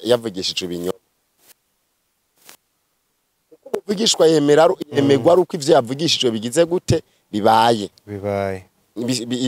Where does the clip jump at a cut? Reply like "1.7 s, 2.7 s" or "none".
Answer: none